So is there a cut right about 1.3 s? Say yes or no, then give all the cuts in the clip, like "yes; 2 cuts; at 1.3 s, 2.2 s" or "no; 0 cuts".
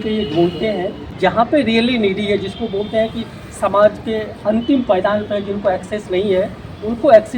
yes; 1 cut; at 1.3 s